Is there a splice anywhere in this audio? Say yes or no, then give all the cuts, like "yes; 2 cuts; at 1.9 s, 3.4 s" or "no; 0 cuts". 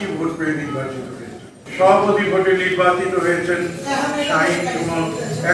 yes; 1 cut; at 1.6 s